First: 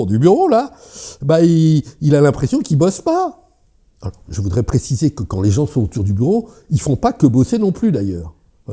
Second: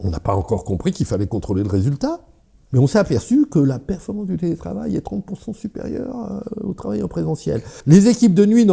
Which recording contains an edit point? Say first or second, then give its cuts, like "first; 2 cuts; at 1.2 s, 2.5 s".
second; 2 cuts; at 2.5 s, 7.7 s